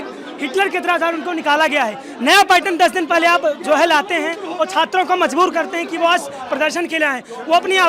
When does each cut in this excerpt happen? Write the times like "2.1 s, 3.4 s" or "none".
none